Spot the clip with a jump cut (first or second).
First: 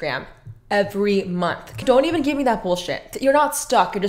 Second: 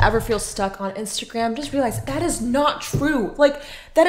first